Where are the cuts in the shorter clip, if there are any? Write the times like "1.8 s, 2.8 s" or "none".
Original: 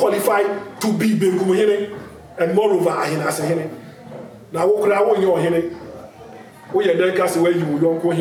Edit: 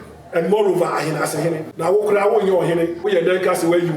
1.7 s, 3.0 s